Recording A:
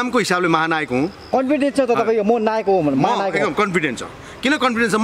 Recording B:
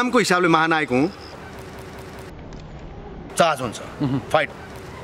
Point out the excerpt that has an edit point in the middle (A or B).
A